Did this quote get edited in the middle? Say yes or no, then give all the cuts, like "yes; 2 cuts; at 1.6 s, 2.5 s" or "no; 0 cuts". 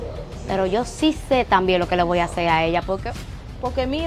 yes; 1 cut; at 3.1 s